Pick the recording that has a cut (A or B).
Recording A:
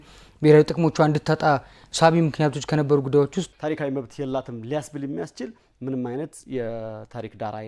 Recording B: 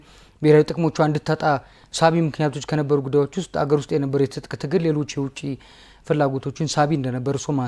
A